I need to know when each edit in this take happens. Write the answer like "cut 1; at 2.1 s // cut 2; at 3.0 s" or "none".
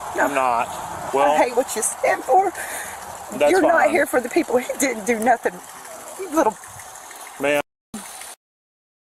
none